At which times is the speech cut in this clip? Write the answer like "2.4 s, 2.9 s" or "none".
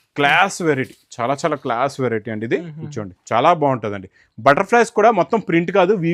none